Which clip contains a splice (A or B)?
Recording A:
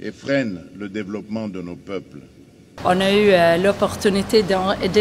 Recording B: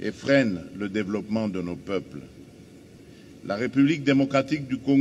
A